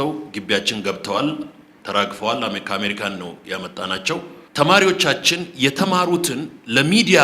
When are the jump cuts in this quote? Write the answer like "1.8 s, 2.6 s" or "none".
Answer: 4.4 s